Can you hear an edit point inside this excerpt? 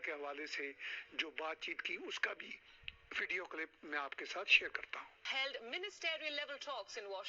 yes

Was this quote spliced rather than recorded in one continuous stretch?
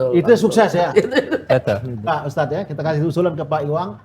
yes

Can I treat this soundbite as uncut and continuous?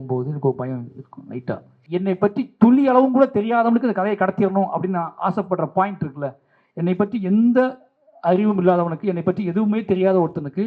no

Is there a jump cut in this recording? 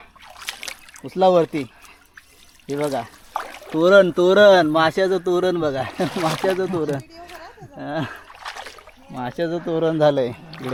no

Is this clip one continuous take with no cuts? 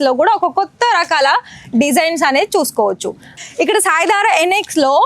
no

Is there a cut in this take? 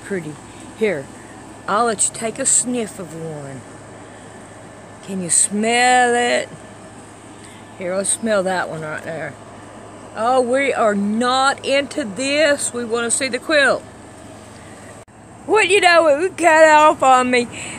yes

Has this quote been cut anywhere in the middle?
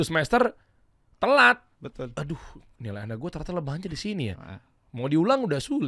no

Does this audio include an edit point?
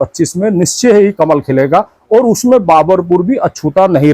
no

